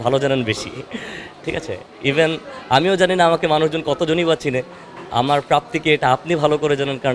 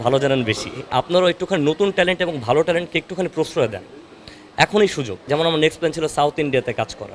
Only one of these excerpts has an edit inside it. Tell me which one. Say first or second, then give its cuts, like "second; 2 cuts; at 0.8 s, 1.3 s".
second; 2 cuts; at 0.9 s, 5.2 s